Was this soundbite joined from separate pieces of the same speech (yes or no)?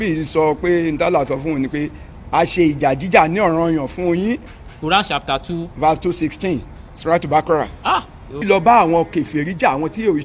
yes